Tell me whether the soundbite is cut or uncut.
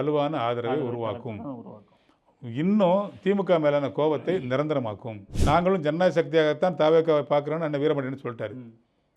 cut